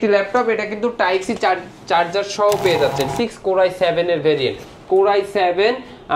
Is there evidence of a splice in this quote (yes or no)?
yes